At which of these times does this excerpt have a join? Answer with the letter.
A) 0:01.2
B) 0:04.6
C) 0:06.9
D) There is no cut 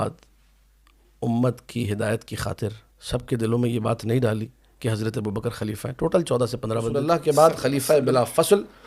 C